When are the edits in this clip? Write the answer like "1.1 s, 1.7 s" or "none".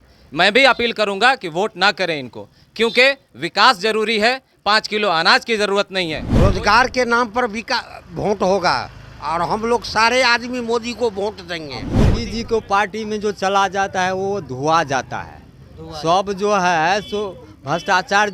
6.2 s, 11.9 s

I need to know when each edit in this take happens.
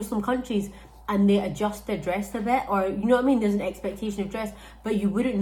none

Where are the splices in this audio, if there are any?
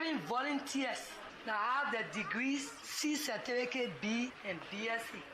none

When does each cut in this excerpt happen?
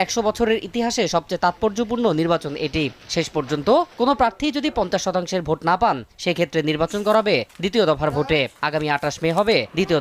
none

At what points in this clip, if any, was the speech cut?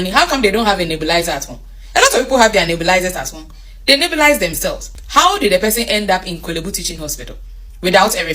4.9 s

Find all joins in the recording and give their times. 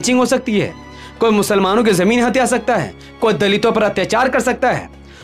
none

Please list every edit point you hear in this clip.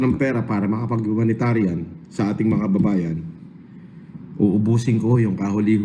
none

